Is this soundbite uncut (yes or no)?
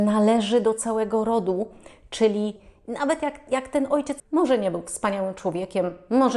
no